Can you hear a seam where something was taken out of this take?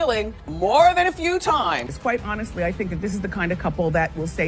yes; 1 cut; at 1.9 s

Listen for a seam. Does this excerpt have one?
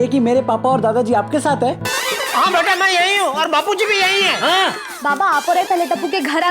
yes; 1 cut; at 4.9 s

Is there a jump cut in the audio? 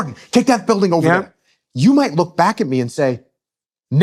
no; 0 cuts

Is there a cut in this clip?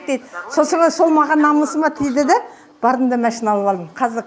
no; 0 cuts

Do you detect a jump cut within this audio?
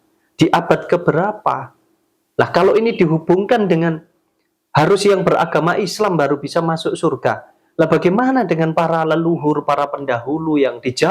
no; 0 cuts

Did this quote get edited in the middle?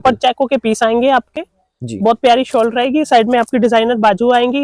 no; 0 cuts

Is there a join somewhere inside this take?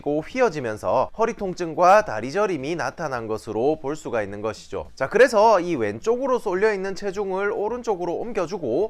no; 0 cuts

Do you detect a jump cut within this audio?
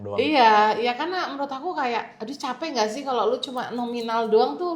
yes; 1 cut; at 2.2 s

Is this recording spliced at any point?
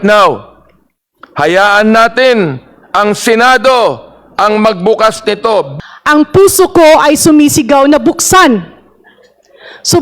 yes; 1 cut; at 5.7 s

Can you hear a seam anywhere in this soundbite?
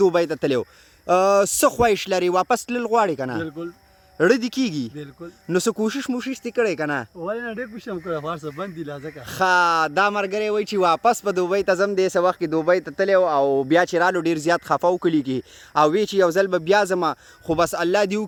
no; 0 cuts

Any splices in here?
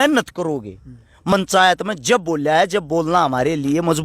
yes; 1 cut; at 1.3 s

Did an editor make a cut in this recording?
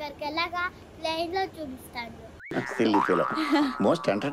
no; 0 cuts

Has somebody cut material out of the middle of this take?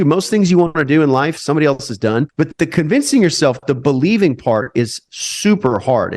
yes; 1 cut; at 2.3 s

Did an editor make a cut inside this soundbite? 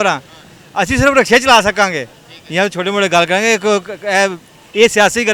no; 0 cuts

